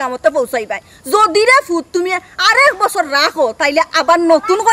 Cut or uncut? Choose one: uncut